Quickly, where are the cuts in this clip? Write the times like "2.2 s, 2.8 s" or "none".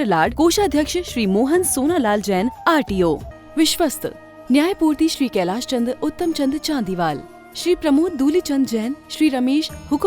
3.3 s